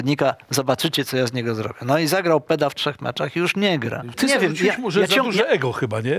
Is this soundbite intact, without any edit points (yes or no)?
no